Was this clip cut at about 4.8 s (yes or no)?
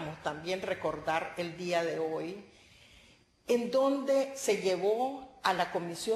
no